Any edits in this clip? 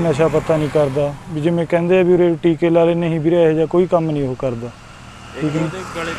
no; 0 cuts

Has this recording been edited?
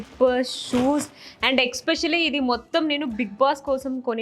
no; 0 cuts

